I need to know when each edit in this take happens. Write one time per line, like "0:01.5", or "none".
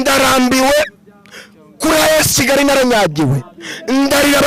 none